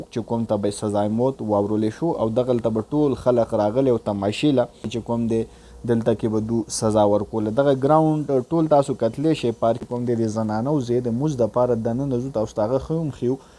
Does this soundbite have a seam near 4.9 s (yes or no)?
yes